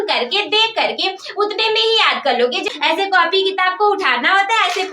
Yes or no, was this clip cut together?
yes